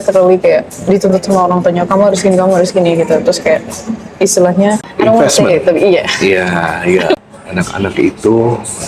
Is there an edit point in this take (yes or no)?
yes